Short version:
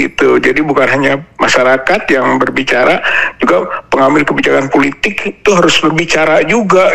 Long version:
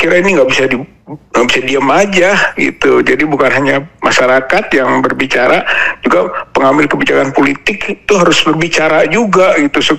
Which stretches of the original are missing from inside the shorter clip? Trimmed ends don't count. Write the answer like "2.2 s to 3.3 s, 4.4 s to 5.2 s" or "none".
none